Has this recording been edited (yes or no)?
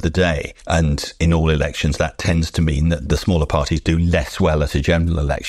yes